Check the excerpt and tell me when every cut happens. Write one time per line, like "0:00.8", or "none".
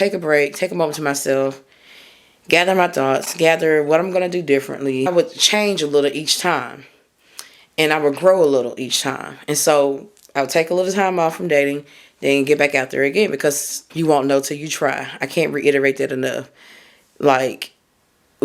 0:05.1
0:13.8